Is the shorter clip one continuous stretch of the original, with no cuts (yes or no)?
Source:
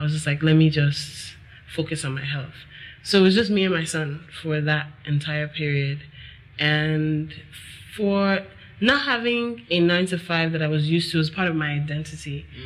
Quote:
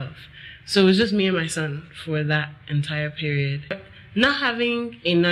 no